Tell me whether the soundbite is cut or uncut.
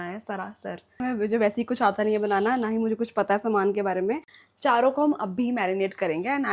cut